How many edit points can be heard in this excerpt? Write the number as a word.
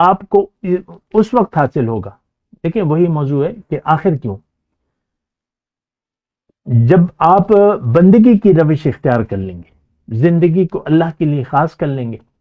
zero